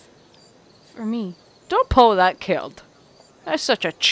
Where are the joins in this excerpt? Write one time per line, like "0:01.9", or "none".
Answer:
none